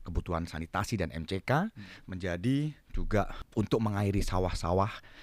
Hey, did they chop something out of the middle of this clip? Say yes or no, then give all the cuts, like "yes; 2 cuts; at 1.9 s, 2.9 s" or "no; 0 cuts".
yes; 1 cut; at 3.4 s